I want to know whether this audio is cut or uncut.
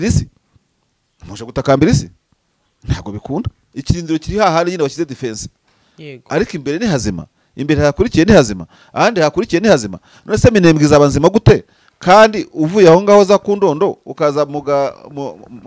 cut